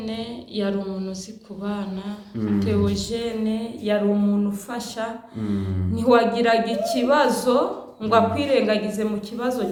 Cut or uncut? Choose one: uncut